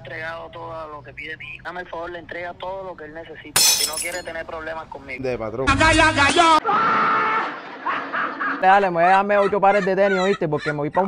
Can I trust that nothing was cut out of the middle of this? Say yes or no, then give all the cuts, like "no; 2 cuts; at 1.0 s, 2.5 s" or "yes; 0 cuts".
no; 3 cuts; at 1.7 s, 5.2 s, 8.6 s